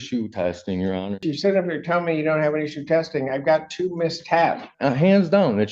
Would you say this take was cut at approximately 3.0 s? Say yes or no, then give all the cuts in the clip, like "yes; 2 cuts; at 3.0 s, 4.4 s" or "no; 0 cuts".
no; 2 cuts; at 1.3 s, 4.7 s